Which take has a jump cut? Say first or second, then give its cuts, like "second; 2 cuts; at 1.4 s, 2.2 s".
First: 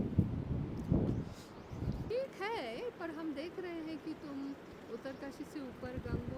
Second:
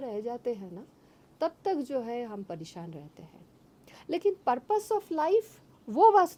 first; 1 cut; at 2.0 s